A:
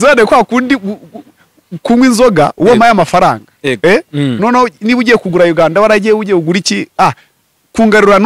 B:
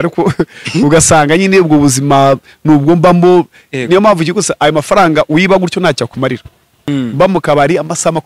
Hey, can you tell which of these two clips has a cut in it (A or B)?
B